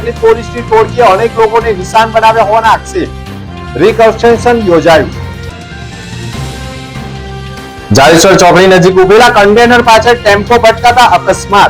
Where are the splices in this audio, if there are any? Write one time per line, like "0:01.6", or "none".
none